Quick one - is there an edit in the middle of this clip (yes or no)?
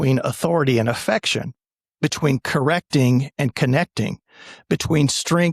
no